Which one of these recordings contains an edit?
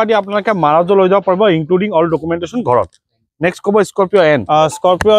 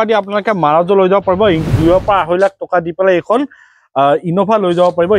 second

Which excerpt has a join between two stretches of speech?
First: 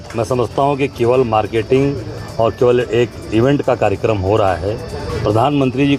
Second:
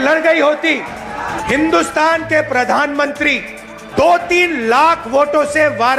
second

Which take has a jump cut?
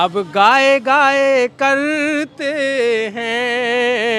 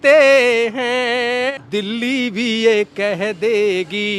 second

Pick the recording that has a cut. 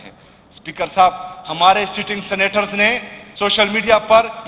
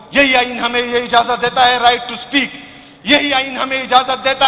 first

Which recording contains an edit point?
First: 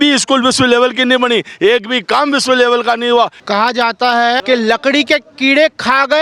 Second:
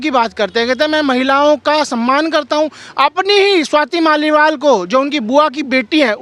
first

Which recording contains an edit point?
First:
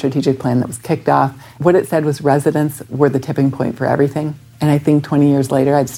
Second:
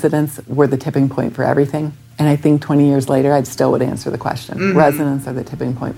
first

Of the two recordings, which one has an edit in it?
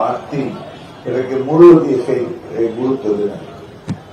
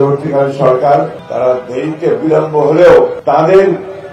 second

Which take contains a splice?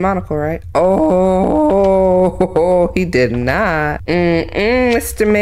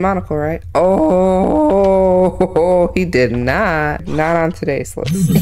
second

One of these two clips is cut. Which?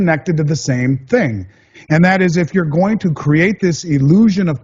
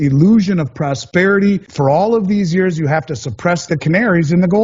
second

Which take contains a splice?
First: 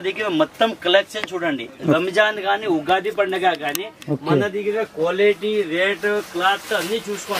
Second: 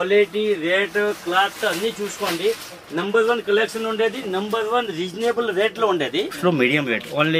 second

